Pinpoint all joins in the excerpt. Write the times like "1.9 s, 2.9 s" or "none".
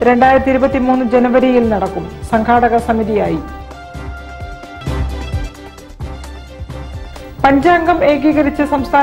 4.7 s, 7.0 s